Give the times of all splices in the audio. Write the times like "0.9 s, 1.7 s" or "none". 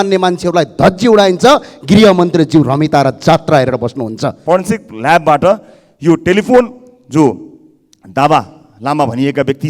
4.4 s